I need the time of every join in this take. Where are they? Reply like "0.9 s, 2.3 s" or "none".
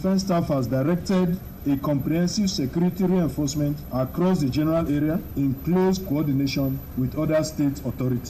5.2 s